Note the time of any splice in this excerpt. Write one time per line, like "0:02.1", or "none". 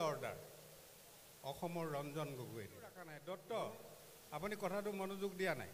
0:03.1